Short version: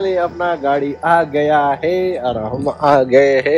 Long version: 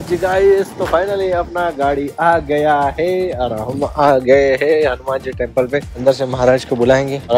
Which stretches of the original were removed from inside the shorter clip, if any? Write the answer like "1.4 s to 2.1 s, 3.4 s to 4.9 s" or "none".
none